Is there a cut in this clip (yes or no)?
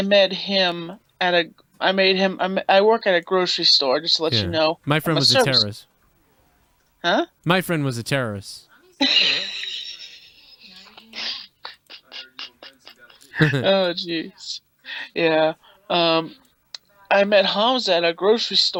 no